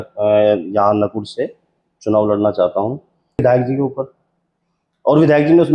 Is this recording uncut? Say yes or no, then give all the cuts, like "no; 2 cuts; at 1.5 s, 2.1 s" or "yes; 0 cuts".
no; 1 cut; at 3.4 s